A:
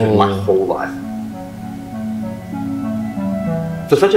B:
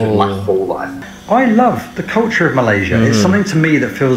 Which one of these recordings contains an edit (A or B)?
B